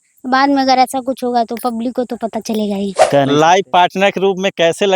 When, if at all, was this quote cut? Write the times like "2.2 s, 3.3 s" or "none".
3.0 s